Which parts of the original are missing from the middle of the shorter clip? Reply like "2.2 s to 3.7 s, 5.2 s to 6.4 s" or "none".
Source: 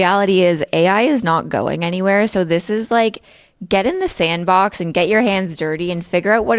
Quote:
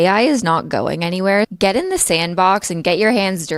2.3 s to 3.6 s

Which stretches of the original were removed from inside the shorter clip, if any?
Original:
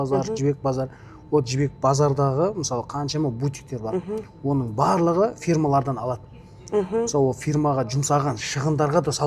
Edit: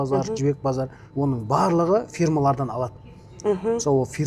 1.0 s to 4.3 s

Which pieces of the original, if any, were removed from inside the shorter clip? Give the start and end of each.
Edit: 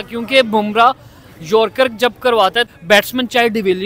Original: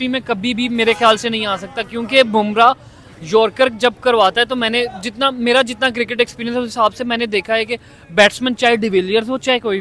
4.5 s to 8.0 s

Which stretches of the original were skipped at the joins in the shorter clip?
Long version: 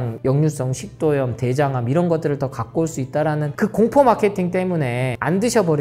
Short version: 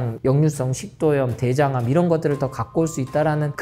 none

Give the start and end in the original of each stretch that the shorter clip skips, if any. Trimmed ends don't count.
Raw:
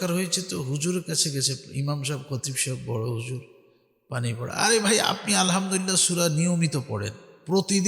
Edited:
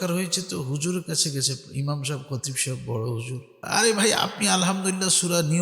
3.6 s to 4.5 s

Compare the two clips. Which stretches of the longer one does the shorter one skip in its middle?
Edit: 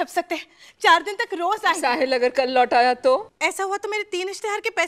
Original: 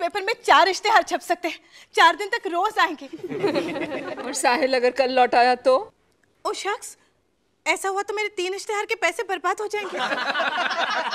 2.9 s to 4.4 s, 5.9 s to 7.6 s

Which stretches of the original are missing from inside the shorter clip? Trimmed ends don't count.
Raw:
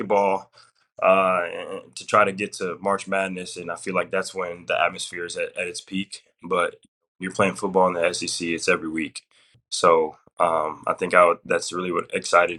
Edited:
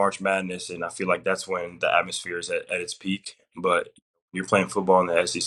none

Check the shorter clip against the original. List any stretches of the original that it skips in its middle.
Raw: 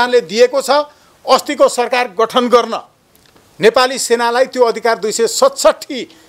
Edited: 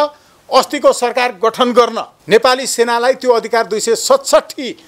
2.8 s to 3.4 s

